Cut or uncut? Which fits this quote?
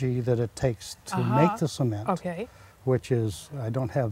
uncut